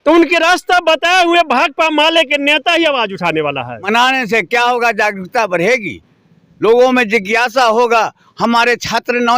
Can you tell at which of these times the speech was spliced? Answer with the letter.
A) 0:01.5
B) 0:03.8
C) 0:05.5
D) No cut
B